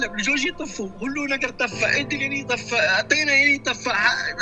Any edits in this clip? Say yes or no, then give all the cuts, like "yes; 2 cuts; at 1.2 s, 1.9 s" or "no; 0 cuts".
no; 0 cuts